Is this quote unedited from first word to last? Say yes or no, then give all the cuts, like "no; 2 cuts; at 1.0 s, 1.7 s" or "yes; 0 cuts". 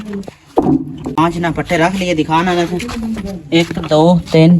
no; 1 cut; at 1.2 s